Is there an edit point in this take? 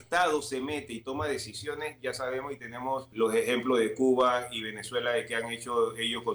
yes; 1 cut; at 3.1 s

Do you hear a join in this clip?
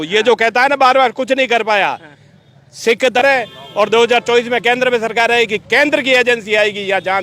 yes; 1 cut; at 3.2 s

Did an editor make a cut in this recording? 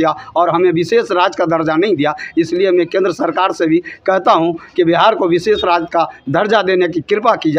no; 0 cuts

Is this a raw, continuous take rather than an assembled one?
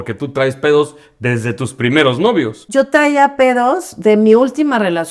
no; 1 cut; at 2.6 s

